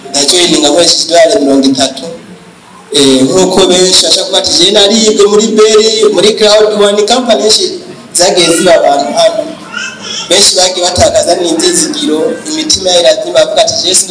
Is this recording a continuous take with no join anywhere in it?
yes; 0 cuts

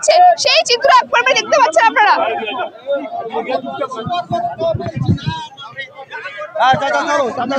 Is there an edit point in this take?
no; 0 cuts

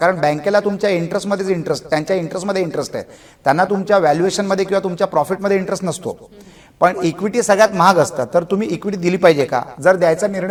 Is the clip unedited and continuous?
yes; 0 cuts

